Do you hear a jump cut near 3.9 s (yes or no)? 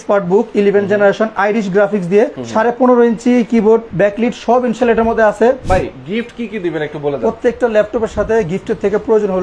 yes